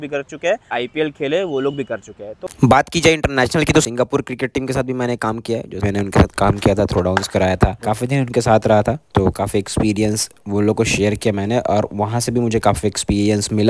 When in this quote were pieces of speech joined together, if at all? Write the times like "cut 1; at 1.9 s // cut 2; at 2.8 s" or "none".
cut 1; at 0.7 s // cut 2; at 2.5 s // cut 3; at 5.8 s

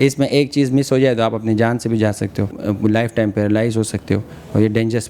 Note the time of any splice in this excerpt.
cut 1; at 2.5 s

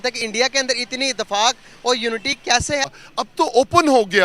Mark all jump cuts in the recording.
cut 1; at 3.0 s

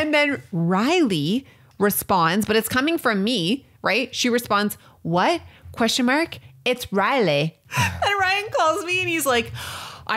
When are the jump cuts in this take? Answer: cut 1; at 7.6 s

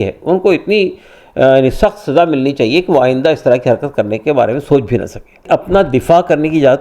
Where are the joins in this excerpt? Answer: cut 1; at 5.4 s

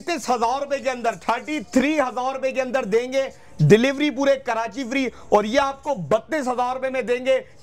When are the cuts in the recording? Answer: none

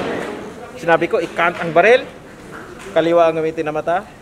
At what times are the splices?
none

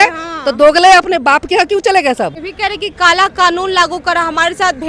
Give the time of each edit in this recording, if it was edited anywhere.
cut 1; at 2.5 s

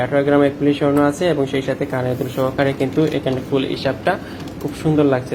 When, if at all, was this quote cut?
none

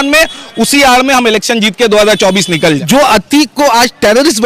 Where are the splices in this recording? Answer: cut 1; at 2.8 s

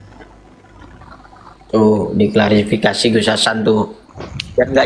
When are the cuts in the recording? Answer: cut 1; at 1.6 s

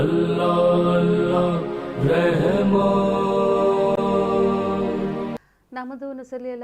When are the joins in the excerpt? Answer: cut 1; at 5.2 s

